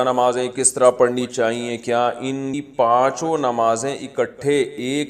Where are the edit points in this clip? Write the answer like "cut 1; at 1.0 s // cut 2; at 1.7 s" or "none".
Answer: cut 1; at 2.6 s